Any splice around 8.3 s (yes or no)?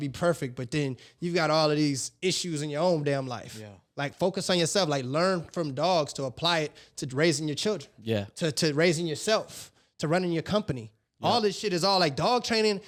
no